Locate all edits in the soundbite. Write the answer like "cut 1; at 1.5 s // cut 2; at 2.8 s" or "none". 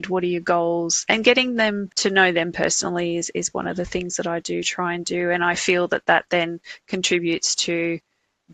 cut 1; at 1.9 s